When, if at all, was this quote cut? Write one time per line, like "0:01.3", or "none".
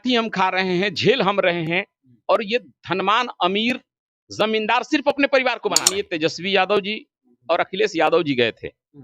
0:05.9